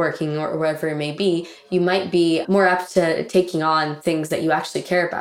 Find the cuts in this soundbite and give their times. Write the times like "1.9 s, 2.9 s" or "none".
2.4 s